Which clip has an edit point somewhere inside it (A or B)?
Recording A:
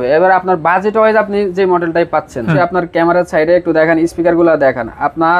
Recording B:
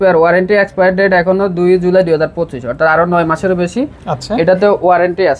A